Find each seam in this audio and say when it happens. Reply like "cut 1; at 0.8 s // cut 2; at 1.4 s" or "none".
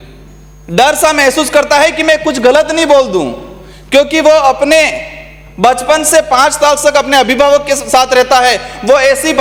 none